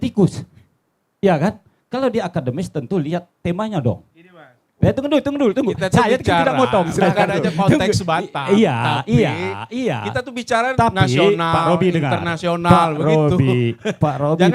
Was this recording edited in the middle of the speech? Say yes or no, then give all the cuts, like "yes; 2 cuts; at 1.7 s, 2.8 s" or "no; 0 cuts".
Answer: no; 0 cuts